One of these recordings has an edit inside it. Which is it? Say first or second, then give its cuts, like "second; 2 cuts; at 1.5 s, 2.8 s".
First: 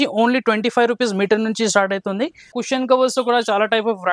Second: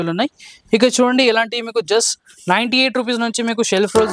first; 1 cut; at 2.5 s